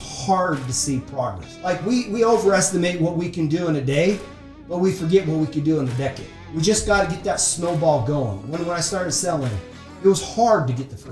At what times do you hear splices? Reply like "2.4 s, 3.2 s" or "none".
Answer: 1.5 s